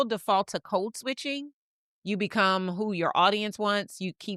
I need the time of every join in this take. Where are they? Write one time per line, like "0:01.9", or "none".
none